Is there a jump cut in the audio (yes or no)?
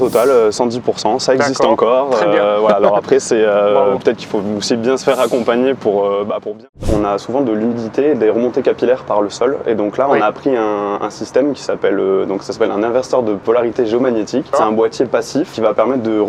yes